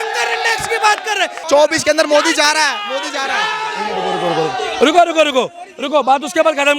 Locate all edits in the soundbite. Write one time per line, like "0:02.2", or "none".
0:01.4